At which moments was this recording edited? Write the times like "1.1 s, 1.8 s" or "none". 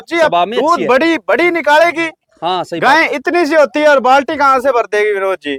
none